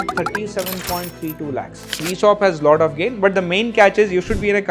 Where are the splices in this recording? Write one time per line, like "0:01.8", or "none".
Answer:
0:02.0